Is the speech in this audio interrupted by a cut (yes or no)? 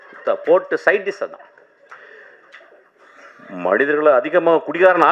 no